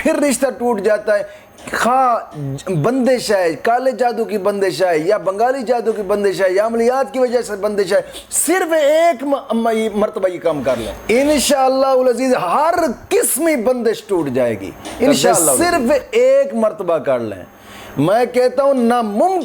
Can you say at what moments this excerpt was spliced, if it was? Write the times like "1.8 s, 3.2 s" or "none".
10.9 s, 15.6 s